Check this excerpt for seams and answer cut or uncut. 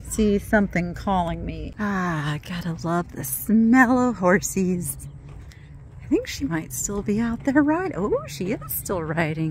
cut